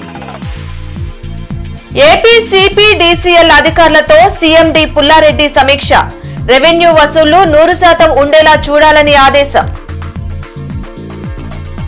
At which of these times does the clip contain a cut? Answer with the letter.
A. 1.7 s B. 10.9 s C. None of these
A